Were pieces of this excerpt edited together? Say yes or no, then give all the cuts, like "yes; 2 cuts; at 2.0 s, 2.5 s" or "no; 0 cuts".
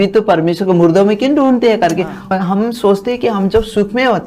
yes; 1 cut; at 2.2 s